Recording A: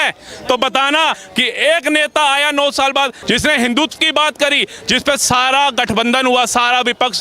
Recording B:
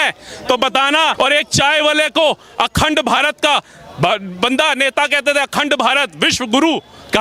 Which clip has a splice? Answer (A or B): A